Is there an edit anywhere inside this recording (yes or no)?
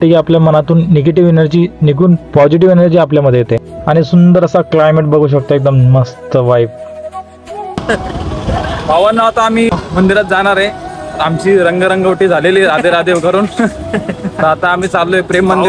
no